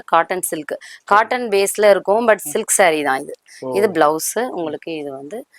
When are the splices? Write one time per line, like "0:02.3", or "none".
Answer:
none